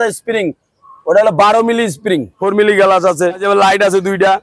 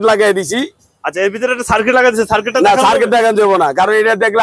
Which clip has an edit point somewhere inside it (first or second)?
first